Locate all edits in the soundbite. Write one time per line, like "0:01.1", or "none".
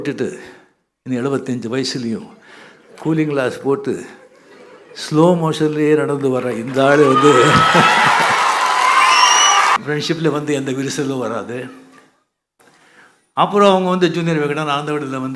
0:09.8